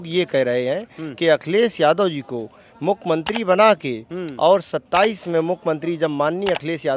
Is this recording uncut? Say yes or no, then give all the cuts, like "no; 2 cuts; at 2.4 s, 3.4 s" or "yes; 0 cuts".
yes; 0 cuts